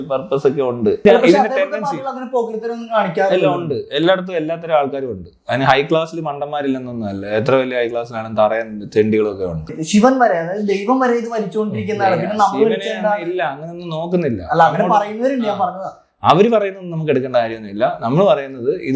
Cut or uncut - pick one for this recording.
cut